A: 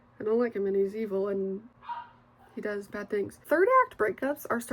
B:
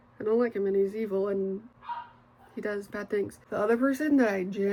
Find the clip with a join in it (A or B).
A